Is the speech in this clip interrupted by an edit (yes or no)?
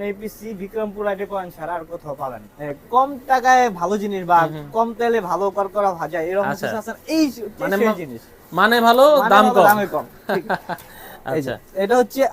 yes